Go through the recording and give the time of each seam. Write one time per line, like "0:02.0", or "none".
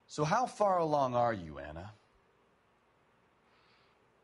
0:02.0